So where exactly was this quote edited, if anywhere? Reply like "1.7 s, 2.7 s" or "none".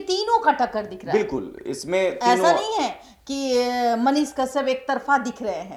none